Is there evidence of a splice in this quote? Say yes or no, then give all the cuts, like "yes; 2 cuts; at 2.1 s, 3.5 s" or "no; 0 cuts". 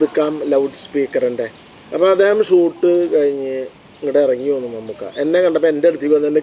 no; 0 cuts